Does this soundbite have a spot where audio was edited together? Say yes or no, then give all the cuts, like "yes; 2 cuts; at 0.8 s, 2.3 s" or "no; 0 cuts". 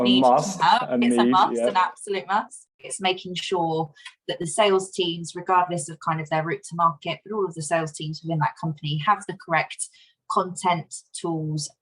yes; 1 cut; at 2.9 s